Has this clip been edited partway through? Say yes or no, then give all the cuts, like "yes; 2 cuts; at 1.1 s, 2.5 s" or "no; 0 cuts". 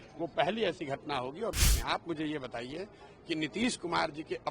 yes; 1 cut; at 1.5 s